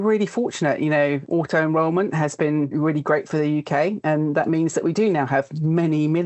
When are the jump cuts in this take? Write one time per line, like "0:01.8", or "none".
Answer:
0:01.2